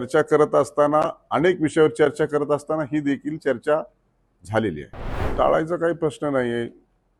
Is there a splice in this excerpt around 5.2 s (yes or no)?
yes